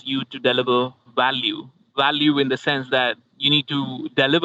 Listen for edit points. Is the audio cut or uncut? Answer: cut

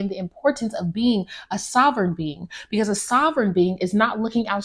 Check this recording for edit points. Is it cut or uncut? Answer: uncut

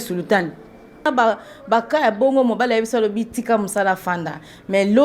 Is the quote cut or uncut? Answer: cut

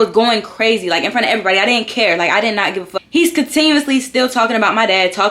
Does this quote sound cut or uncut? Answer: cut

